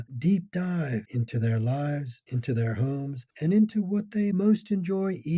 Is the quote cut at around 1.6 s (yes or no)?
no